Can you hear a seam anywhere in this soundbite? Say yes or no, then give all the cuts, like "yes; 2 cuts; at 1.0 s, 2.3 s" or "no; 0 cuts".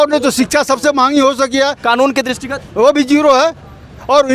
no; 0 cuts